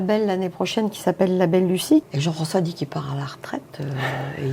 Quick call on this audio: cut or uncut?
cut